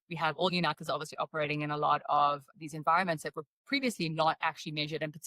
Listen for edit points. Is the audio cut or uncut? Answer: cut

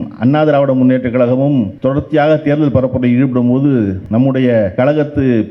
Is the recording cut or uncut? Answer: cut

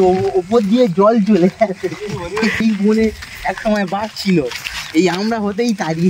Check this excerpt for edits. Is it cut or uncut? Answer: cut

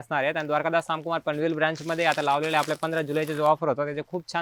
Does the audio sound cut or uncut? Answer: uncut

